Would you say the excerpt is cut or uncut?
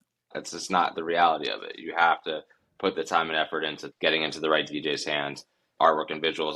cut